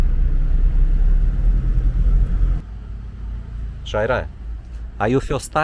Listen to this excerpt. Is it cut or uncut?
cut